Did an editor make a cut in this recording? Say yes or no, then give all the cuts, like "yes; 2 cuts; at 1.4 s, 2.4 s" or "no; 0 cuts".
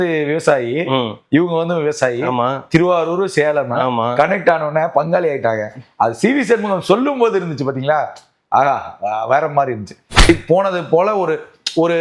yes; 1 cut; at 10.2 s